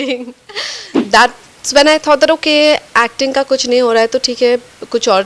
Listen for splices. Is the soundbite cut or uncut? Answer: cut